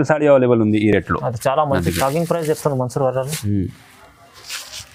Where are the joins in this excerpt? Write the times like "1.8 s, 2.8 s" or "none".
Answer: none